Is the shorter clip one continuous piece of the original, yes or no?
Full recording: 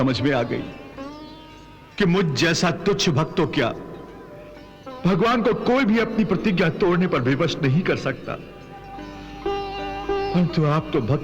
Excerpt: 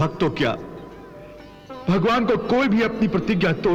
yes